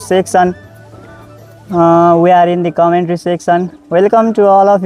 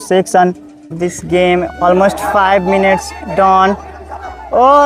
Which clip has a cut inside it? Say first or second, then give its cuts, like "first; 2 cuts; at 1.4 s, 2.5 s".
second; 1 cut; at 1.0 s